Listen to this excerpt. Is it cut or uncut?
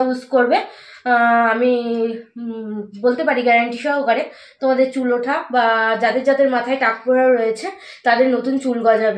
uncut